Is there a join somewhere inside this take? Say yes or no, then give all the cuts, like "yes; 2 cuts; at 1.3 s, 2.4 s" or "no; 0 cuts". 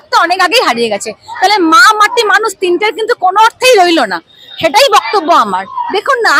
no; 0 cuts